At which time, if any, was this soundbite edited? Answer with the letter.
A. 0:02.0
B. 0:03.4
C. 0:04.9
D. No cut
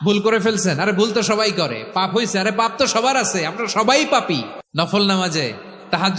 C